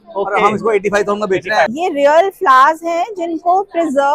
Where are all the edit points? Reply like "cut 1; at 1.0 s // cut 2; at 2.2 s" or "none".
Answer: cut 1; at 1.7 s